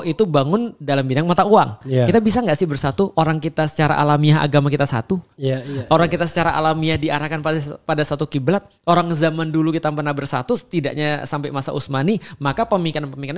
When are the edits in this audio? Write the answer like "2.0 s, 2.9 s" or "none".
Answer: none